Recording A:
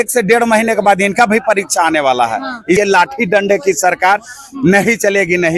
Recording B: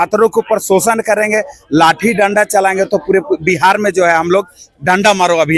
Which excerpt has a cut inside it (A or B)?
A